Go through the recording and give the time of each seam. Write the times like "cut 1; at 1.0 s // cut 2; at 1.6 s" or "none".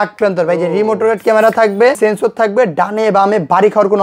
cut 1; at 2.0 s